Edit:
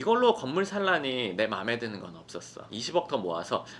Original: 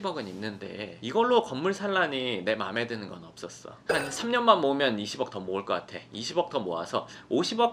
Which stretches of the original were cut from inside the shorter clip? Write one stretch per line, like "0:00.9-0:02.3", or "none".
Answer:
0:03.7-0:06.0